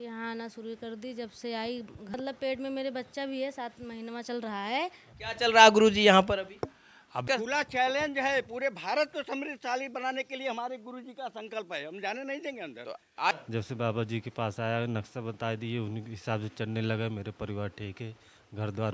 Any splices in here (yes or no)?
yes